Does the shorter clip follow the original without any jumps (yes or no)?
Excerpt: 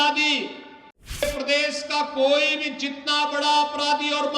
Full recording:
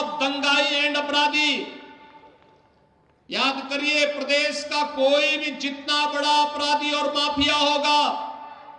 no